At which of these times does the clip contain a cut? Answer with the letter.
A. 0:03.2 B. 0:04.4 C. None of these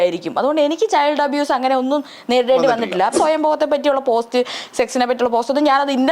A